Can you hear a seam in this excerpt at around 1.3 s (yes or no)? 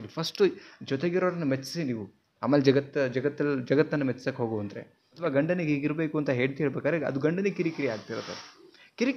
no